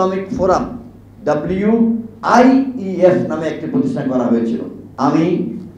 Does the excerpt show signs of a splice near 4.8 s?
yes; 1 cut; at 4.8 s

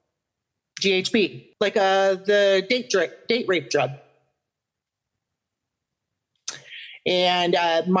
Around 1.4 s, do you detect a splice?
yes; 1 cut; at 1.4 s

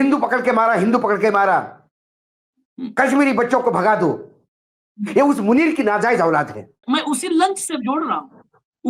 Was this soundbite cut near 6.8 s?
yes; 1 cut; at 6.8 s

